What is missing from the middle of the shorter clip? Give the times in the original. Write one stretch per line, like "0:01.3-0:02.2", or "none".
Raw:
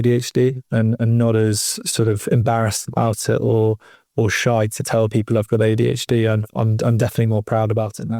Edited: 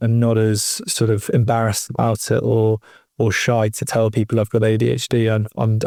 none